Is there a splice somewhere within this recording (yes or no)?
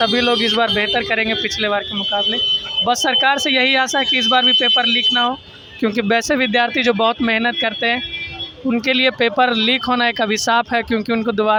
no